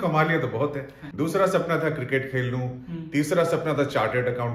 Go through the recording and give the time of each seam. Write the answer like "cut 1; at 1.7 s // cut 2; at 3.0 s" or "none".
cut 1; at 1.0 s

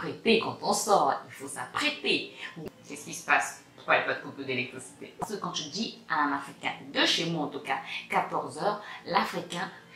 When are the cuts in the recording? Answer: cut 1; at 2.5 s // cut 2; at 5.2 s

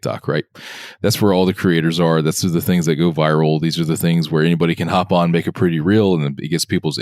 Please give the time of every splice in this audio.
none

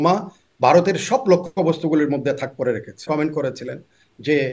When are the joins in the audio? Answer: cut 1; at 3.1 s

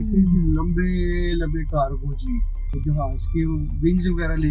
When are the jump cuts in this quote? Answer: cut 1; at 2.7 s

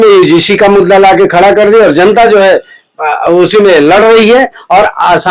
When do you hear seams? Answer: none

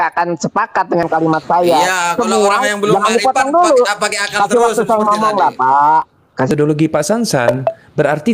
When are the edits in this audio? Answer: cut 1; at 6.5 s

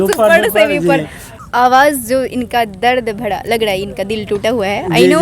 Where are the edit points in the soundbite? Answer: cut 1; at 1.4 s

